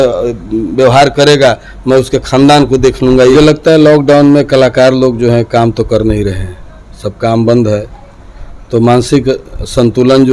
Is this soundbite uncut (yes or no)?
no